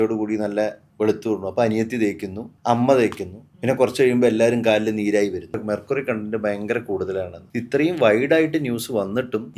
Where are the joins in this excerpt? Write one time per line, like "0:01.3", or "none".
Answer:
0:05.5